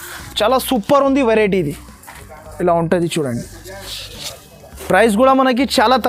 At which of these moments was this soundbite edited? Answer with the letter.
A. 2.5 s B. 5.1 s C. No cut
C